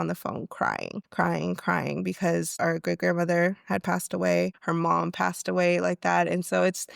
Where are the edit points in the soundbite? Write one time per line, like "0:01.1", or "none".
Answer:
0:01.0
0:02.5
0:04.6

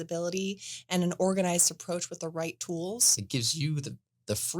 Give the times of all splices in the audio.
0:03.2

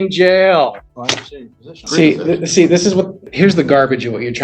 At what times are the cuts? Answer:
0:01.8
0:03.2

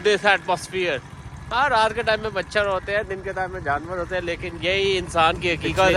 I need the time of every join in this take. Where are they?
none

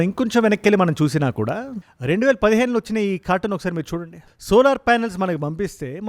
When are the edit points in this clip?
none

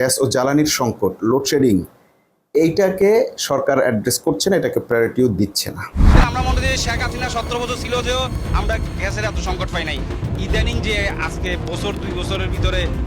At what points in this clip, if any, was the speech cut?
0:05.9

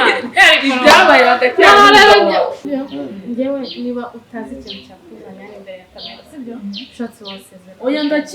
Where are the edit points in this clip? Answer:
0:02.6

